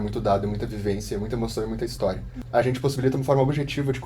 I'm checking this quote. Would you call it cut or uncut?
cut